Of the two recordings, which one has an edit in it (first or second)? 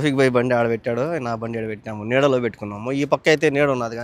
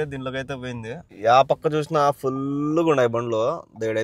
second